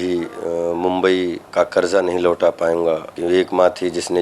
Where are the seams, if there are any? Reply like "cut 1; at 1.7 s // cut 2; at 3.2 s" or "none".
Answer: cut 1; at 1.5 s // cut 2; at 3.1 s